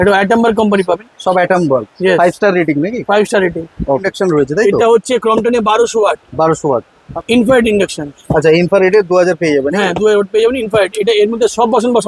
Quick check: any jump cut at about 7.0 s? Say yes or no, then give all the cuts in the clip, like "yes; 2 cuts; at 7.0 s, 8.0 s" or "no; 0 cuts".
yes; 2 cuts; at 4.1 s, 7.0 s